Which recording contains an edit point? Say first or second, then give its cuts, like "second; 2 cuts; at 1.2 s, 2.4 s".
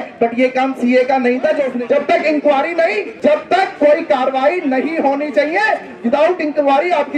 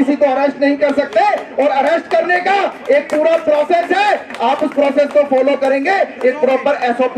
first; 2 cuts; at 1.7 s, 3.1 s